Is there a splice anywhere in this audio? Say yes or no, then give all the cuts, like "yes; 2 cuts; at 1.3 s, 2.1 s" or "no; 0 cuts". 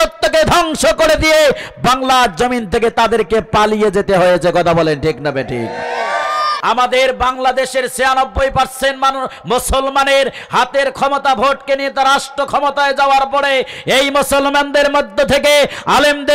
yes; 1 cut; at 6.5 s